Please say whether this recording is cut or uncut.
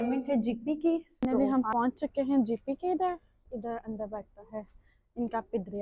cut